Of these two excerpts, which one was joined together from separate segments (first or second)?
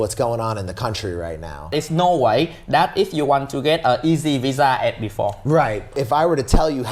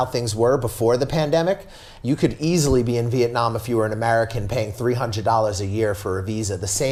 first